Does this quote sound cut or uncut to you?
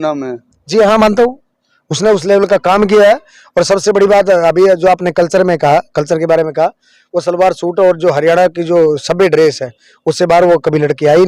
uncut